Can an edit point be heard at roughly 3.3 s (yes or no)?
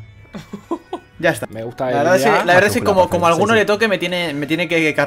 no